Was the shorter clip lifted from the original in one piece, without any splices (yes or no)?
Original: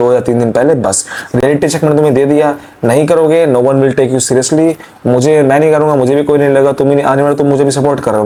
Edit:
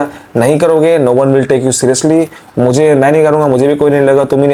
yes